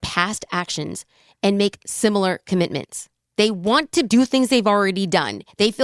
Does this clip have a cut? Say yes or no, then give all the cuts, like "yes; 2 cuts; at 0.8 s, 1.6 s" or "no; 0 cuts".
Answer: yes; 2 cuts; at 3.2 s, 4.1 s